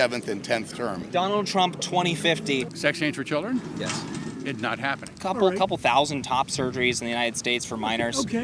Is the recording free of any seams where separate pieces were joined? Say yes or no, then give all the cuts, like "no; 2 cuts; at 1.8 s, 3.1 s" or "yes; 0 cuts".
no; 3 cuts; at 1.0 s, 2.7 s, 5.1 s